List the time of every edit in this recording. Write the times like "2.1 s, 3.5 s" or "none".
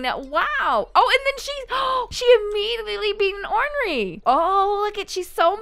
4.1 s